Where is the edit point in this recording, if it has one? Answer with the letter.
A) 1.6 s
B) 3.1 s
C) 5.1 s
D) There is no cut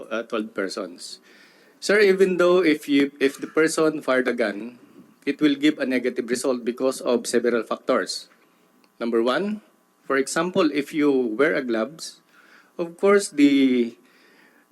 D